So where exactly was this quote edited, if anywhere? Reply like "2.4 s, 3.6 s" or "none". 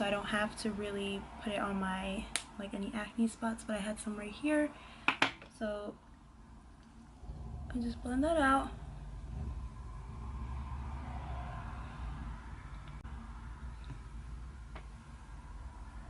13.0 s